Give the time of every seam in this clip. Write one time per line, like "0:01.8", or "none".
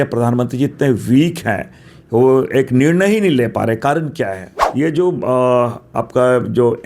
0:04.5